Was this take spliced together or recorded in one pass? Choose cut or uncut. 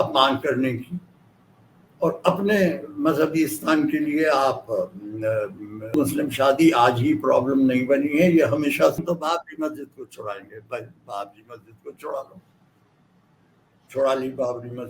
cut